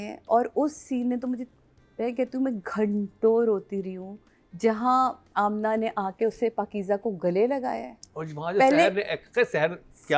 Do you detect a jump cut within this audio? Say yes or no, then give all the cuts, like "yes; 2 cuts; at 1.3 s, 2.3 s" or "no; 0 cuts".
no; 0 cuts